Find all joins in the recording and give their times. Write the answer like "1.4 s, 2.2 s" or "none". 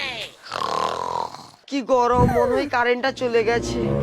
1.6 s